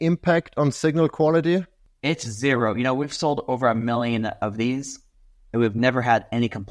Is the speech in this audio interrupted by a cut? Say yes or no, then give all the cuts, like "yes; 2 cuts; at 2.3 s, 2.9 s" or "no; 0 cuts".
yes; 1 cut; at 1.8 s